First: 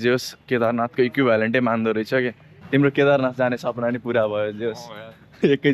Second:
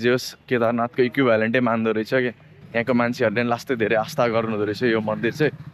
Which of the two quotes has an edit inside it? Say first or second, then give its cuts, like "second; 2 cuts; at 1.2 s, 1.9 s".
first; 1 cut; at 2.5 s